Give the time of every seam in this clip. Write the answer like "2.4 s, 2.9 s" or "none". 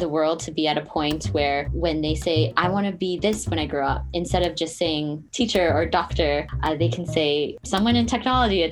1.7 s, 5.2 s, 6.5 s, 7.6 s